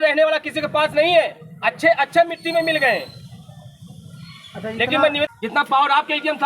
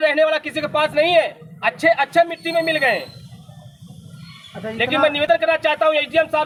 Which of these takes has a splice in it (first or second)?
first